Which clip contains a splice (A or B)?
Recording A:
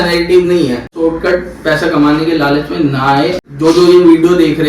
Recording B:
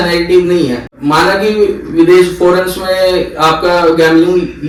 A